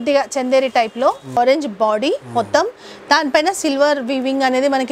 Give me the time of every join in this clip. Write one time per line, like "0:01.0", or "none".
0:01.4